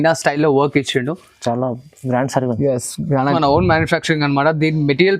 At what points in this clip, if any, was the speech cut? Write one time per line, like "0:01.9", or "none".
0:03.2

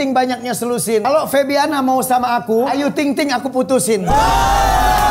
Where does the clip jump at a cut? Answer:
0:01.0
0:02.7

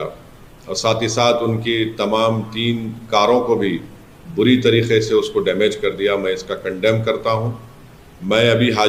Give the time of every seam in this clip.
none

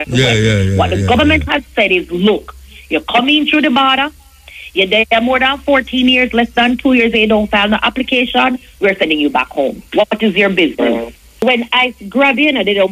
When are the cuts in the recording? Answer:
0:11.4

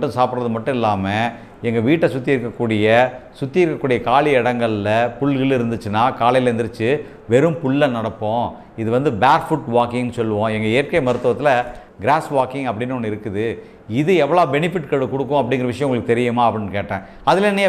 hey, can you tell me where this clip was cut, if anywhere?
none

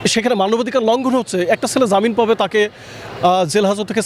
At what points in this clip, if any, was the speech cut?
none

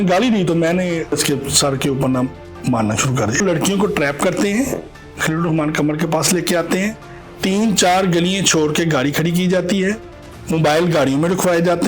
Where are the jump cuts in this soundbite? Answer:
0:01.1
0:03.4

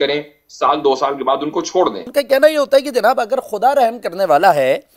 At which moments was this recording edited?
0:02.1

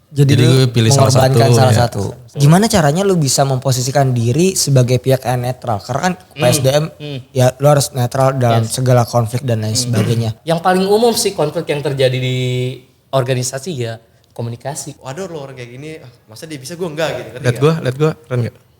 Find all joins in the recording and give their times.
0:02.3
0:10.3
0:15.0

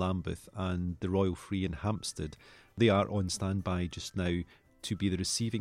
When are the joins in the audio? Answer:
0:02.8

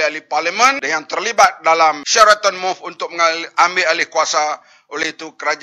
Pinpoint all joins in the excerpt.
0:00.8
0:02.0

